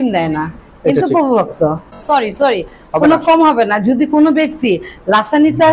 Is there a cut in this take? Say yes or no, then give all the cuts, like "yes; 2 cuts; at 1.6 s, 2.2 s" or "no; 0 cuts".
yes; 1 cut; at 2.0 s